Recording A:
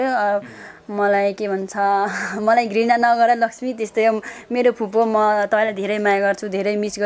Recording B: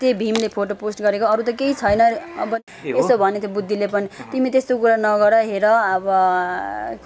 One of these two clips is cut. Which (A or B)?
B